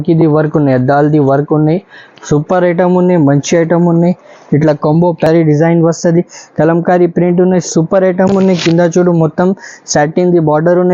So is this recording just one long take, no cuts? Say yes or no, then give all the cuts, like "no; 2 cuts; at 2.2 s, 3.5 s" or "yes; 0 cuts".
no; 1 cut; at 5.3 s